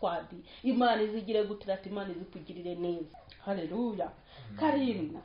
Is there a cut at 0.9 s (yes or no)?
no